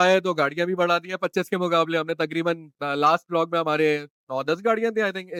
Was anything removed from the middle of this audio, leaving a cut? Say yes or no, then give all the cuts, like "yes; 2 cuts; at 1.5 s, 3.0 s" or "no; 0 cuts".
no; 0 cuts